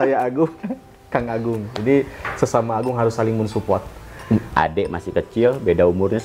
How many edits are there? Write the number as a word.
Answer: one